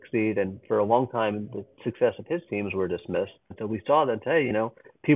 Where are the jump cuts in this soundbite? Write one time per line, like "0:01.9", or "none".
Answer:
0:03.6